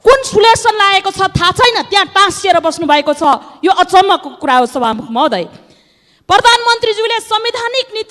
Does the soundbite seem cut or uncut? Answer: uncut